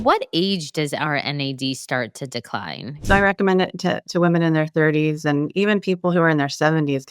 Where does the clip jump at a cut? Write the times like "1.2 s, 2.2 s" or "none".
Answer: 3.0 s